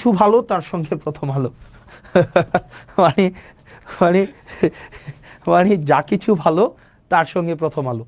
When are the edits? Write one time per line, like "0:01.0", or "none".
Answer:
none

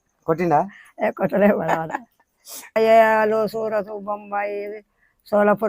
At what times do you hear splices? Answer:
0:02.8

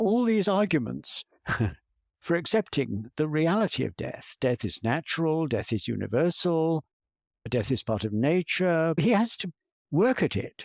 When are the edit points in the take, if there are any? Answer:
0:09.0

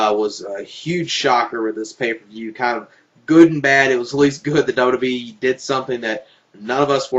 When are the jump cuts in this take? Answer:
0:04.7

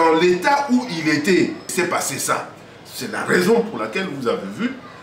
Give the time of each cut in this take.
0:01.7

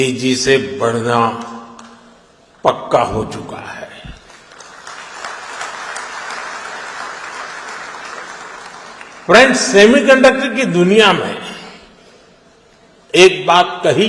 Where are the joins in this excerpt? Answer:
none

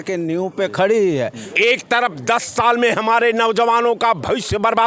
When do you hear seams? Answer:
0:01.4

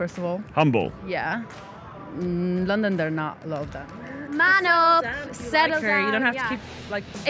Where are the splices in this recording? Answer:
0:04.2

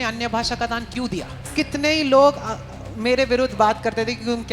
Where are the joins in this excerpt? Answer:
0:01.4

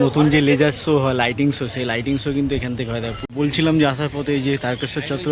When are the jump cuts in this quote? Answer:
0:03.2

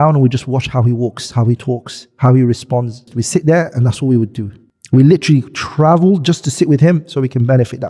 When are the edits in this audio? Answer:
none

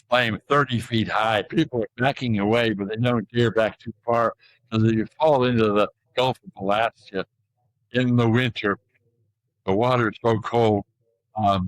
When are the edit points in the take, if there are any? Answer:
0:01.5

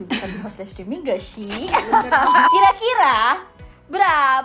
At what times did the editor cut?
0:02.5

